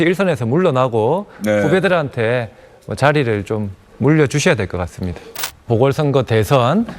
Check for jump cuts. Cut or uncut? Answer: cut